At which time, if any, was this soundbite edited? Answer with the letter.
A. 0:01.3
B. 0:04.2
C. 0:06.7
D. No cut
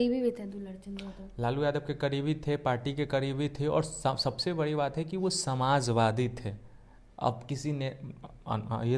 D